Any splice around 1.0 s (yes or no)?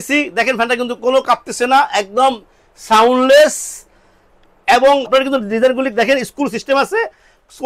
no